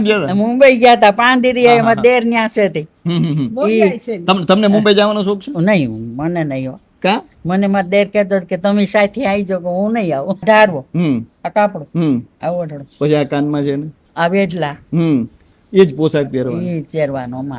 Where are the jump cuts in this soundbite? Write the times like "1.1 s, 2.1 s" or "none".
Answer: 10.4 s